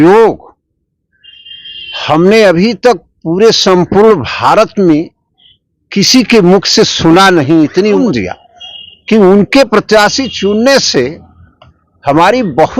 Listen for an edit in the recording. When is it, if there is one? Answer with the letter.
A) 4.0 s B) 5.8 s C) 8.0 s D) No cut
C